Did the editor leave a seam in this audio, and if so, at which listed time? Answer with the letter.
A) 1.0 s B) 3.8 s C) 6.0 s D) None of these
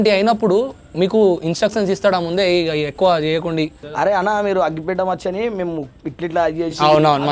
B